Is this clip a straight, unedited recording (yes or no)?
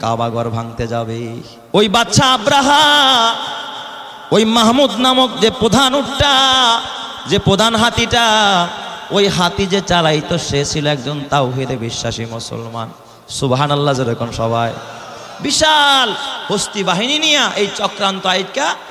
no